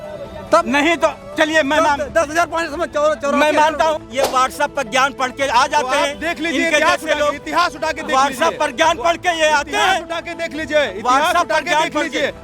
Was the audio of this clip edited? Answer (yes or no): yes